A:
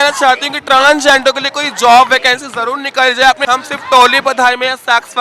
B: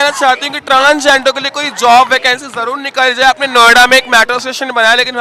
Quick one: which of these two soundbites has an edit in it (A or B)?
A